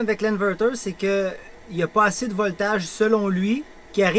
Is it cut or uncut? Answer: uncut